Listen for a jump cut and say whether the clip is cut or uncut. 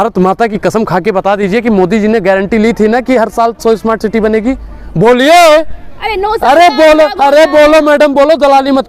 uncut